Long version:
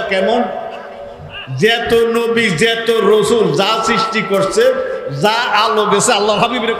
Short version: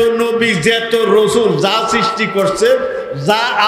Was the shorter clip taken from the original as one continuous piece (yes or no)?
yes